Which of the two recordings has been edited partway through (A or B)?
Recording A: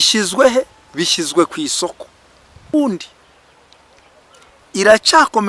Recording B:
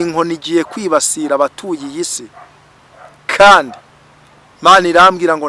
A